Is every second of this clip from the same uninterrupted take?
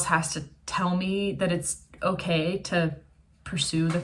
yes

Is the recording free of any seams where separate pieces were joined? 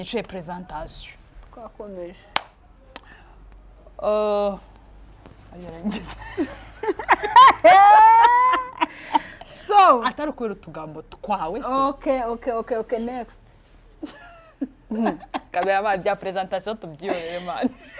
yes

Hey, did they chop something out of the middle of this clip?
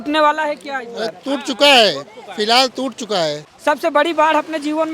yes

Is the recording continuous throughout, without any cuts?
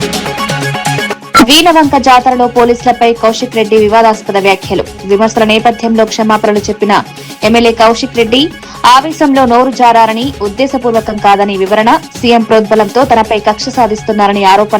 no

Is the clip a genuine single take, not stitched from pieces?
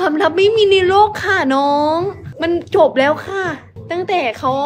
yes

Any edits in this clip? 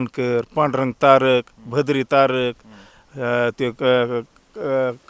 no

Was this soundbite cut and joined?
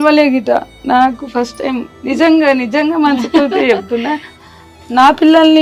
no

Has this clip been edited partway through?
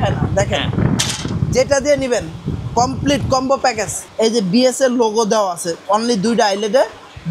yes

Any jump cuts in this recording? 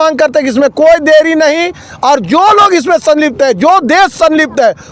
no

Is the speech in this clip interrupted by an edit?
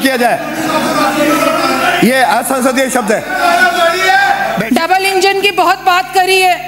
yes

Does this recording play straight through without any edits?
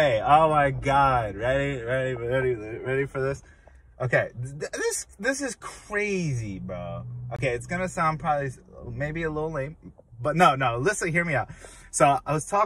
yes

